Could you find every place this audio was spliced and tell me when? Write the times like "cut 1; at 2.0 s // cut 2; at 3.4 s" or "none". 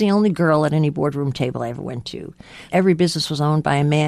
cut 1; at 2.7 s